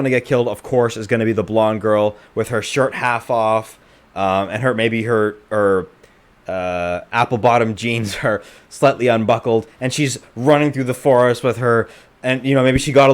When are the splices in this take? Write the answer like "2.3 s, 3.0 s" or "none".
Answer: none